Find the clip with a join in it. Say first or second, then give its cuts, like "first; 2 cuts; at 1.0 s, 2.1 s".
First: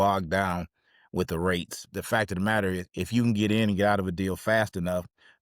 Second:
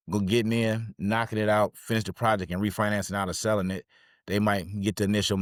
first; 1 cut; at 2.0 s